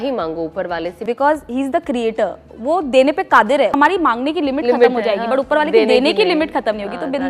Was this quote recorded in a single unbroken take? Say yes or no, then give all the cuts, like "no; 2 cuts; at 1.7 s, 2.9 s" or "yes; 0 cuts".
no; 2 cuts; at 1.0 s, 3.7 s